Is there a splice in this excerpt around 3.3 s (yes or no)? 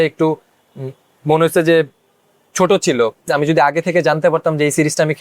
yes